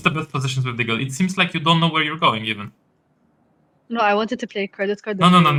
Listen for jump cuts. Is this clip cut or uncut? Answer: uncut